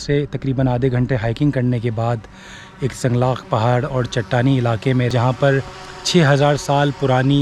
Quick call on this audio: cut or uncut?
cut